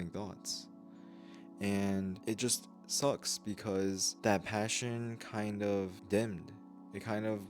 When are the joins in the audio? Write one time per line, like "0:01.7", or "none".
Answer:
0:02.2
0:04.1
0:06.0